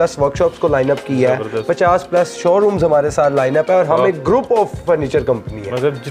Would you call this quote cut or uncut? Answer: uncut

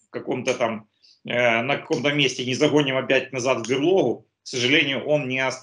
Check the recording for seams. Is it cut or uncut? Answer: uncut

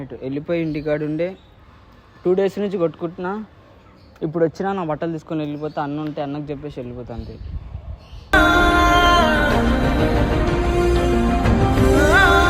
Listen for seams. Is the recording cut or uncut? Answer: uncut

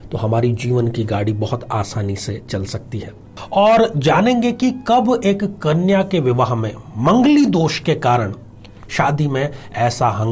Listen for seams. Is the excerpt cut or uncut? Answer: cut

